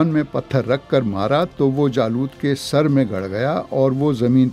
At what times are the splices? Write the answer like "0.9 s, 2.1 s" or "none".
none